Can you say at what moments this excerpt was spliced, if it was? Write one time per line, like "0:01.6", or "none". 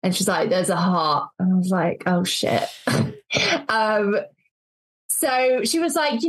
none